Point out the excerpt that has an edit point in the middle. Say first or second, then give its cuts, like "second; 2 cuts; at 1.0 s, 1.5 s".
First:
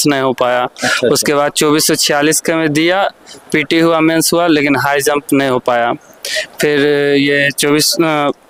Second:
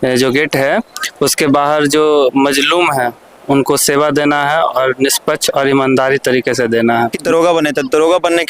second; 1 cut; at 7.2 s